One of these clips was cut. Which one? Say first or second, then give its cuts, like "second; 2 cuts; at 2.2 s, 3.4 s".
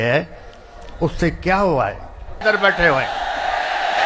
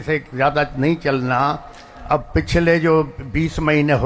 first; 1 cut; at 2.4 s